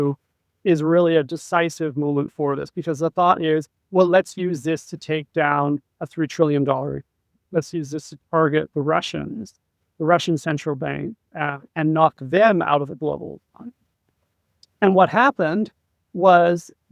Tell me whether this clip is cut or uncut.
uncut